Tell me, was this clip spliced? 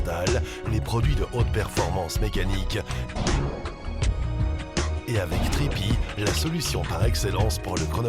no; 0 cuts

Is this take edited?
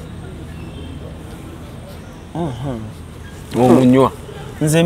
no; 0 cuts

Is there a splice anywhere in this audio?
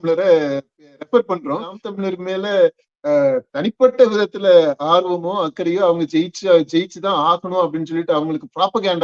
yes; 1 cut; at 1.8 s

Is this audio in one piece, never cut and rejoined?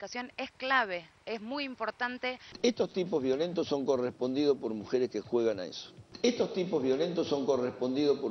no; 1 cut; at 2.5 s

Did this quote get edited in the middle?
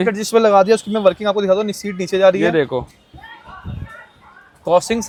no; 0 cuts

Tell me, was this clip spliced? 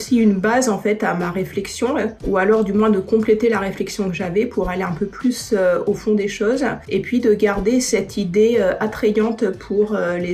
no; 0 cuts

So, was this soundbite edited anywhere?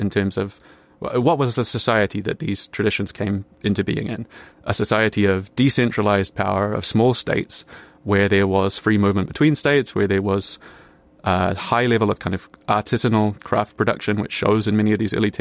no; 0 cuts

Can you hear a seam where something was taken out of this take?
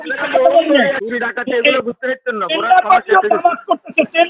yes; 1 cut; at 1.0 s

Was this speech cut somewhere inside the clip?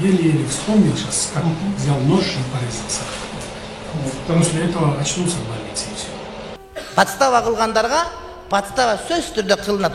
yes; 1 cut; at 6.5 s

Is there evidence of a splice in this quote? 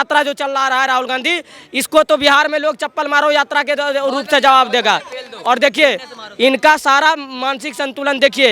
no; 0 cuts

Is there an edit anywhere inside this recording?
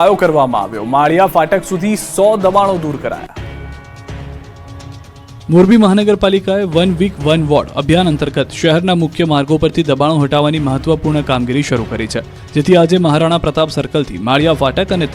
no; 0 cuts

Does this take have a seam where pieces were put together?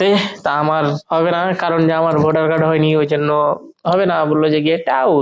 no; 0 cuts

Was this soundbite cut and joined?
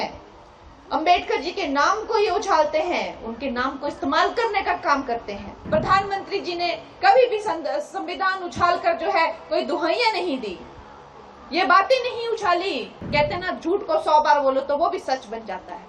yes; 2 cuts; at 5.5 s, 13.0 s

